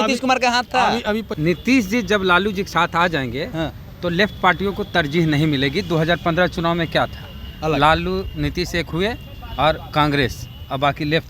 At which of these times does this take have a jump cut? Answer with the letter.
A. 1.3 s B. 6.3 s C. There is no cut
A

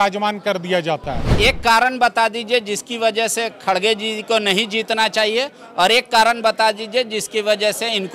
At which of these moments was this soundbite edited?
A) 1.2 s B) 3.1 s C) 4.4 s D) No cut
A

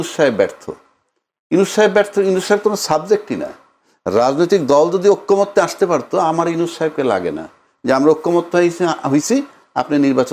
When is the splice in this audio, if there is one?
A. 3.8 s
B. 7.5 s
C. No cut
C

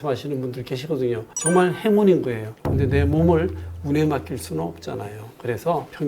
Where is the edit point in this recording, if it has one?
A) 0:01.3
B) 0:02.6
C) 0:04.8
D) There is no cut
B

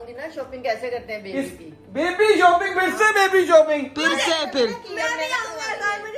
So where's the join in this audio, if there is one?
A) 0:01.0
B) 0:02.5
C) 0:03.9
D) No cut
D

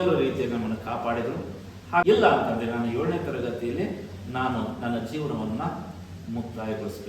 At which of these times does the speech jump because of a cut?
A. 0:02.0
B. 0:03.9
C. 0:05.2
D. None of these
A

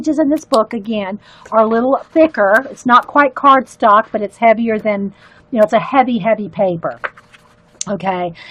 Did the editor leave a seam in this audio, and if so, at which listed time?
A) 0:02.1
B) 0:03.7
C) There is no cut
C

